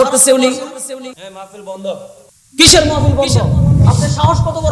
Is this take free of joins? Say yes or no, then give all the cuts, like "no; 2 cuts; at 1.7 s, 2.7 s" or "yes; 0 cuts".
no; 1 cut; at 1.2 s